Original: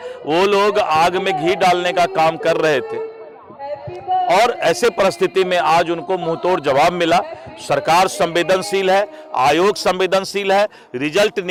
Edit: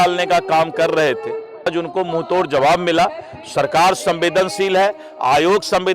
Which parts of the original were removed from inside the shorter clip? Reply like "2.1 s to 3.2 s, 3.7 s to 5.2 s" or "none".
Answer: 3.4 s to 5.8 s